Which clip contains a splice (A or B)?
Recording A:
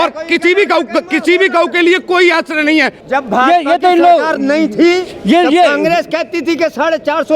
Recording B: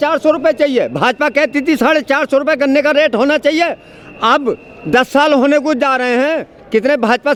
A